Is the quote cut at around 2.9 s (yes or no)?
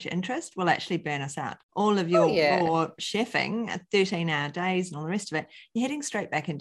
no